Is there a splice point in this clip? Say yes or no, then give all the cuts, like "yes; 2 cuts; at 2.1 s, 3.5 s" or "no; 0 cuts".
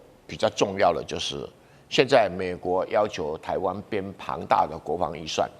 no; 0 cuts